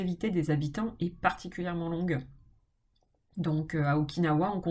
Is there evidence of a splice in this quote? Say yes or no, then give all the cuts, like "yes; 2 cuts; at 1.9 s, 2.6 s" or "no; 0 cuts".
no; 0 cuts